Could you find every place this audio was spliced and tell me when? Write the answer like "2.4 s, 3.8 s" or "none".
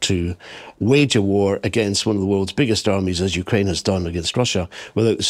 none